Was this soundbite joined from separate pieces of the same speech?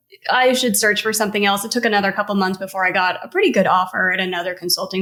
no; 0 cuts

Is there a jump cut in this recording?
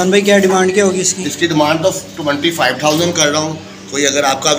no; 0 cuts

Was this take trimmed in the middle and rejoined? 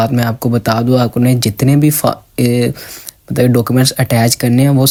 no; 0 cuts

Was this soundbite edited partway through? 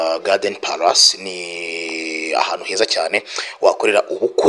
no; 0 cuts

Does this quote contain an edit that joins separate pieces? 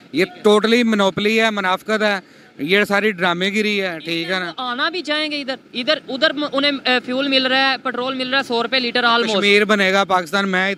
no; 0 cuts

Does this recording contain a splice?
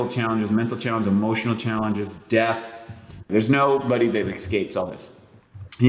yes; 1 cut; at 3.2 s

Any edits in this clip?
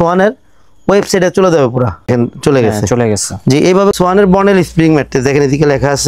yes; 2 cuts; at 2.1 s, 3.9 s

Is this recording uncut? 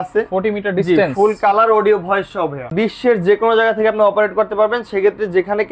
no; 1 cut; at 2.7 s

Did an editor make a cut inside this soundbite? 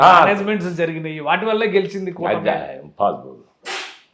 no; 0 cuts

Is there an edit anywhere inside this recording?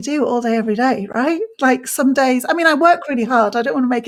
no; 0 cuts

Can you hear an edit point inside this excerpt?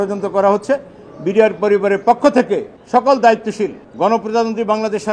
yes; 2 cuts; at 2.7 s, 3.8 s

